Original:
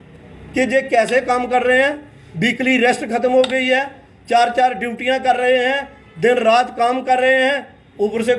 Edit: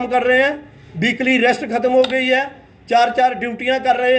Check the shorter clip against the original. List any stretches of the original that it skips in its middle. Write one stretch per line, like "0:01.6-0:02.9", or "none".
none